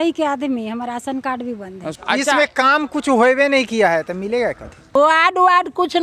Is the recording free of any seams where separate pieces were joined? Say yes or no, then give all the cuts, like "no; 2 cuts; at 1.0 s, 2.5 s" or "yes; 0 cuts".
no; 2 cuts; at 2.0 s, 4.9 s